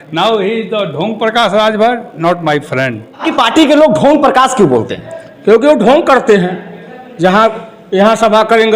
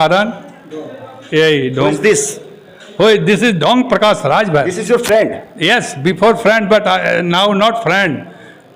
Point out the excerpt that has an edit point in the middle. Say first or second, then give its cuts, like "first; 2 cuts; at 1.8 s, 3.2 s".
first; 1 cut; at 3.2 s